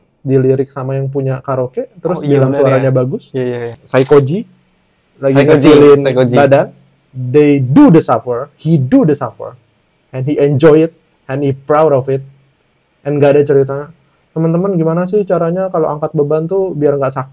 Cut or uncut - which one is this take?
cut